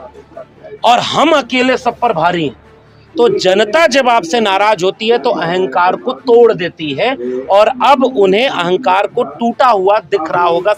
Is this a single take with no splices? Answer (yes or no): yes